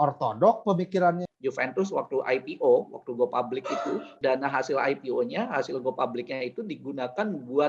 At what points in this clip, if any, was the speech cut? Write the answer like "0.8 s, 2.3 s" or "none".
1.3 s, 4.1 s

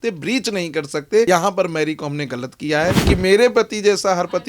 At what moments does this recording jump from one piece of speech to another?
1.3 s, 3.0 s

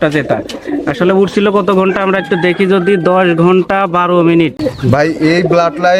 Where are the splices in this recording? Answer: 4.6 s

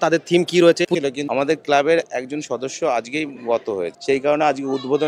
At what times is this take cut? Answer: 0.9 s, 3.9 s

